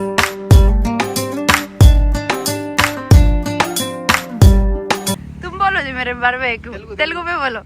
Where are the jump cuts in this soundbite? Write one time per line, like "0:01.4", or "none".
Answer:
0:05.3